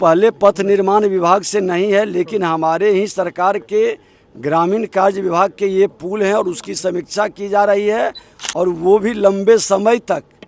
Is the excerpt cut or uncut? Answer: uncut